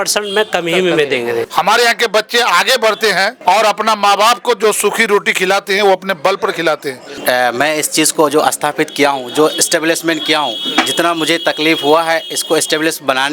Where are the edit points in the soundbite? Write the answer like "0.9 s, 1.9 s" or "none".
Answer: 1.5 s, 3.3 s, 7.2 s